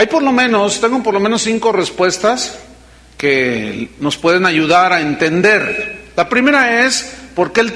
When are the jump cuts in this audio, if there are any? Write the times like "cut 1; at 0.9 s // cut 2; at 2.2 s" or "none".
none